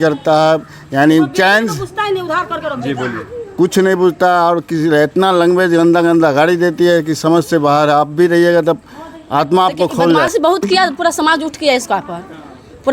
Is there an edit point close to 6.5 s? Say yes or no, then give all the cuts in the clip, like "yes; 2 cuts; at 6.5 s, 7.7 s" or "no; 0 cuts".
no; 1 cut; at 10.3 s